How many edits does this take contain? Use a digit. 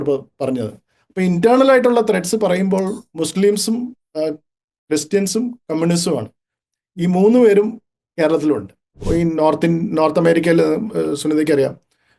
1